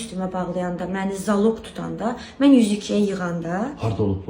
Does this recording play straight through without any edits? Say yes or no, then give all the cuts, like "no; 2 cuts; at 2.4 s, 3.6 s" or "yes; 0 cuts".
yes; 0 cuts